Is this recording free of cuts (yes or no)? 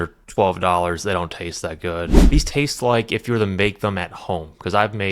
no